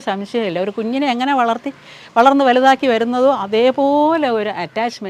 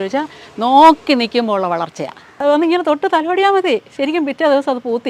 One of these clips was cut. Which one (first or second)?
second